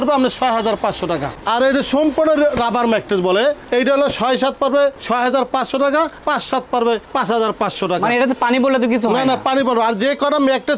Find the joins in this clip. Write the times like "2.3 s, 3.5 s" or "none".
none

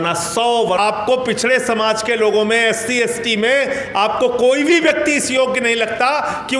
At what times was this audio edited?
1.0 s

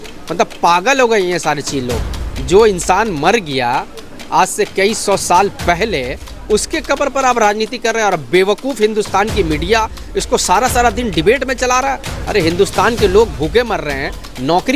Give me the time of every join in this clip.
none

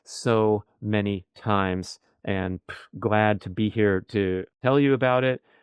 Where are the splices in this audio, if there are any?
4.5 s

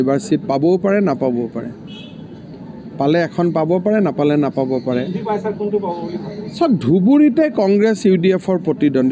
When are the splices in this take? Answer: none

